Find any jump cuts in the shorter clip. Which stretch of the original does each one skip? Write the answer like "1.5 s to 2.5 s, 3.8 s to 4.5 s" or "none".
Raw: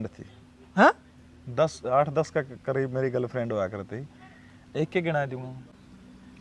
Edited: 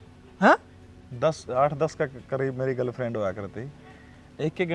none